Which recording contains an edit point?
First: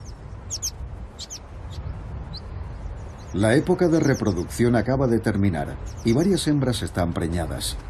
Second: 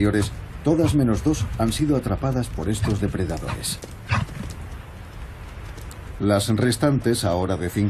second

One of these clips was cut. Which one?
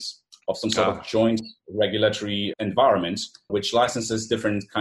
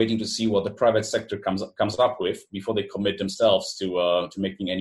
first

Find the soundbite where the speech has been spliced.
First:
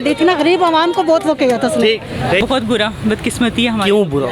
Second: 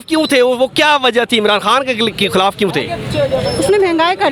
first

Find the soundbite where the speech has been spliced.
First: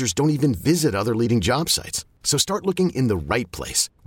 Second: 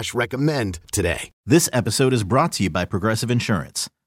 second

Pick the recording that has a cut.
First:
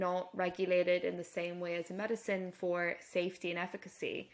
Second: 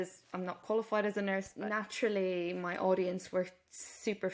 second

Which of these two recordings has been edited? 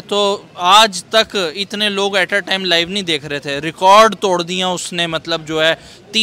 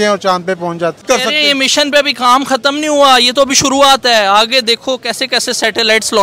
second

